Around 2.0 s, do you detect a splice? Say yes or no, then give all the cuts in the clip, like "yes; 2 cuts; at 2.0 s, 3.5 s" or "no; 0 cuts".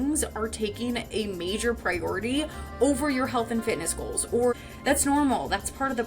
no; 1 cut; at 4.5 s